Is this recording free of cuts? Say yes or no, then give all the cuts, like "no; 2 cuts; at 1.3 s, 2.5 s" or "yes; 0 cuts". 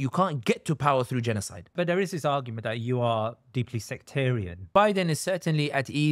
no; 2 cuts; at 1.7 s, 4.7 s